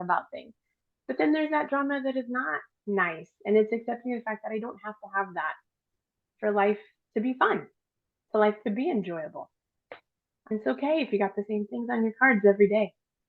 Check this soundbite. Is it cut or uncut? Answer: uncut